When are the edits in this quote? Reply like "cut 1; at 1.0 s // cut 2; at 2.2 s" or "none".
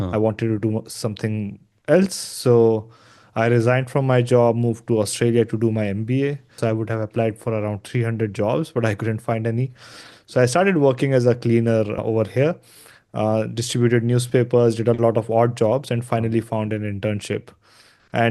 cut 1; at 6.6 s // cut 2; at 12.0 s